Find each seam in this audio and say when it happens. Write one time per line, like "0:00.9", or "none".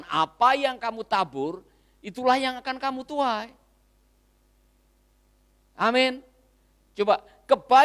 none